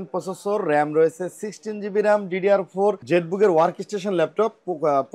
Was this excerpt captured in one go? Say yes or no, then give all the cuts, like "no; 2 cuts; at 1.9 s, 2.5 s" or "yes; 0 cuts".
no; 1 cut; at 3.0 s